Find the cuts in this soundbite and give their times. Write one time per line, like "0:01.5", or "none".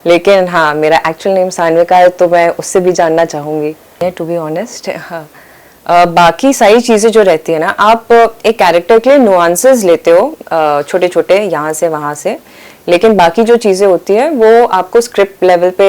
0:04.0

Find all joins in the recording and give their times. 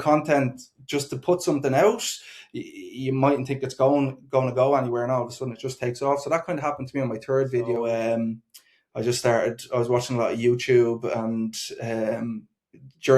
0:07.9

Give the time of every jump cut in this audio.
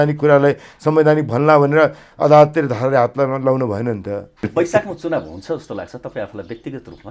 0:04.4

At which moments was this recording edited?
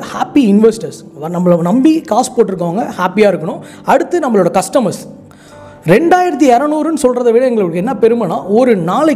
none

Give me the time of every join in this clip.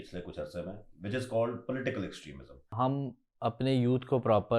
0:02.7

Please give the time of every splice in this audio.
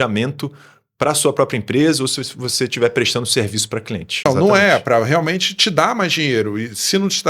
0:04.3

